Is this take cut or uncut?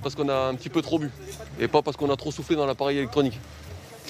uncut